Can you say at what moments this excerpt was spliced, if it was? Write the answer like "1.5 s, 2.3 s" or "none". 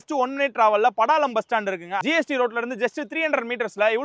2.0 s